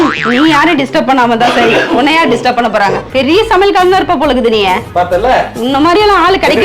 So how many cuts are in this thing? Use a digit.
1